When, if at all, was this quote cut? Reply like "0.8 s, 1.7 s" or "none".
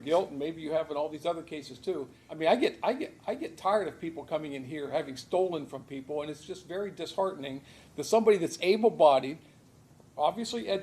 2.2 s